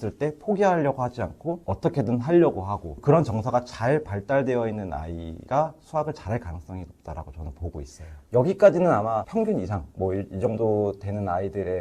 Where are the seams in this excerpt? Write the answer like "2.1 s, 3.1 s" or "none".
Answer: none